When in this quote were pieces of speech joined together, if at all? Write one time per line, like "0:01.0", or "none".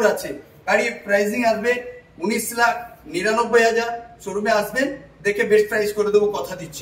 none